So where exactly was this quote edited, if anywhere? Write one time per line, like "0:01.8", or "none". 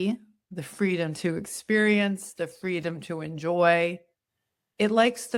none